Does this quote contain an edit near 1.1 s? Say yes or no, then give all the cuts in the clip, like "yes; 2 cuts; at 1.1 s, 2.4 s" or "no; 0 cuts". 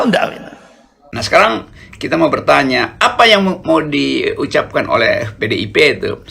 yes; 1 cut; at 1.1 s